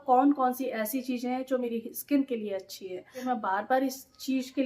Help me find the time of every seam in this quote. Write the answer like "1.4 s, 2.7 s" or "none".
1.7 s, 3.2 s